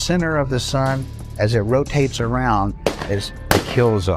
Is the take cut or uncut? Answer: uncut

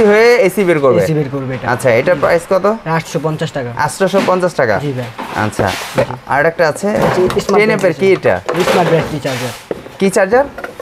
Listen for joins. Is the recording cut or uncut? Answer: uncut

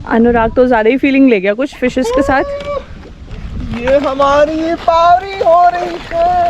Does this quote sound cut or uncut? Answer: uncut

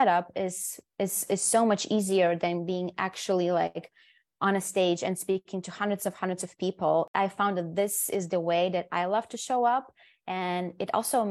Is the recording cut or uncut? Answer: cut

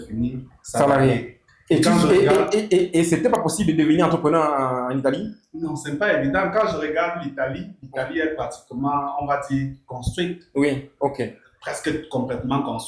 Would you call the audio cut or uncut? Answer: uncut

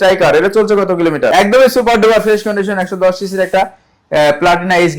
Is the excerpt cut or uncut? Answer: cut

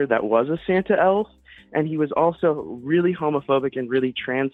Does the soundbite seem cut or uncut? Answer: uncut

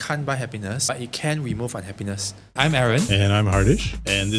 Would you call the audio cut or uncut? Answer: cut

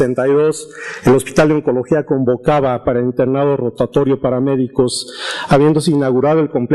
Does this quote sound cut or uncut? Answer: uncut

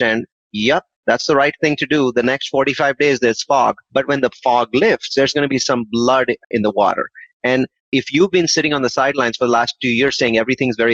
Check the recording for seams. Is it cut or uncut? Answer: uncut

